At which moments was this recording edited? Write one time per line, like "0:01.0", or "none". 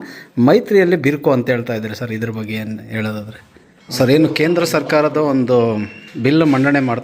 0:03.8